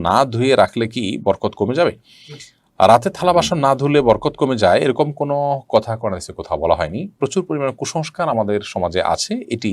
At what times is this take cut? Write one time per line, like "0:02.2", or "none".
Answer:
none